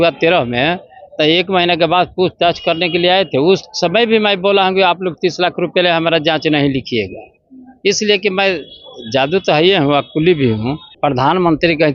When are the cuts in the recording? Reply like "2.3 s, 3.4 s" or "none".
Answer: 10.8 s